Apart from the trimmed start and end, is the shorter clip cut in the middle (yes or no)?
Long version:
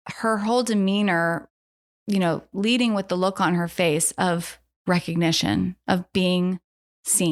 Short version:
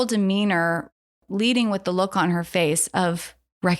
yes